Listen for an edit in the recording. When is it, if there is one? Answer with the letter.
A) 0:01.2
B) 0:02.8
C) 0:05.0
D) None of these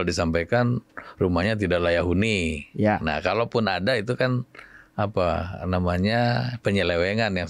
D